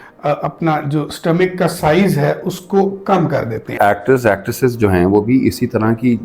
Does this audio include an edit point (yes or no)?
yes